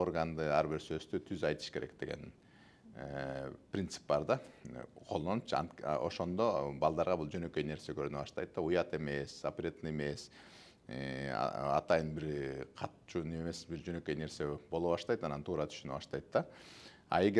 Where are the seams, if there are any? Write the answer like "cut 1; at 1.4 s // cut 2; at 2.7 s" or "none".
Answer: none

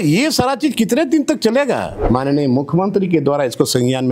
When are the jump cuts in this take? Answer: cut 1; at 1.9 s

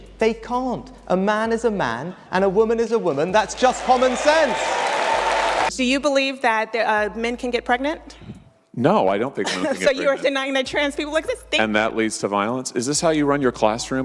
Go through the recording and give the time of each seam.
cut 1; at 5.7 s // cut 2; at 11.4 s

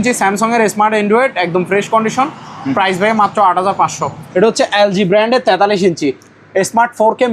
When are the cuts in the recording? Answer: cut 1; at 4.2 s

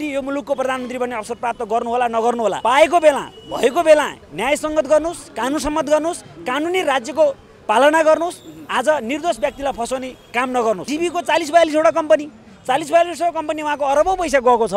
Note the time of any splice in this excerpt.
cut 1; at 10.9 s

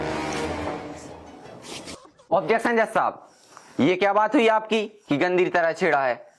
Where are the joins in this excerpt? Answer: cut 1; at 1.9 s

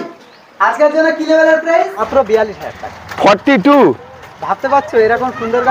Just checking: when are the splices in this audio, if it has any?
cut 1; at 2.0 s

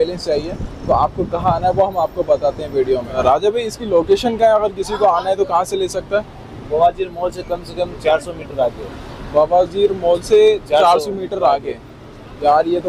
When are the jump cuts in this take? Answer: none

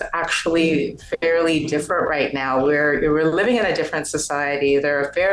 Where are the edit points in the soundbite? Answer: none

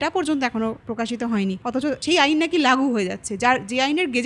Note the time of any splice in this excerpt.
cut 1; at 1.8 s

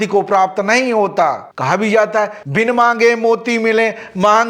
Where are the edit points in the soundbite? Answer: cut 1; at 1.5 s

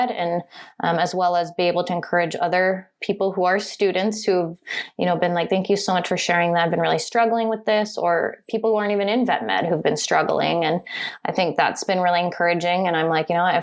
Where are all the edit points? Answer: cut 1; at 2.9 s

